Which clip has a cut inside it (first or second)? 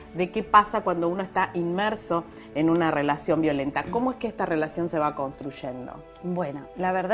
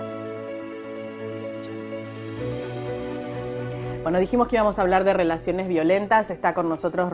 first